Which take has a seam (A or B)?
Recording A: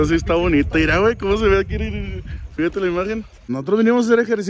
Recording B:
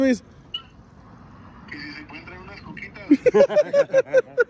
A